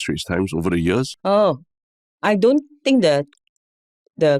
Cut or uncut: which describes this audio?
cut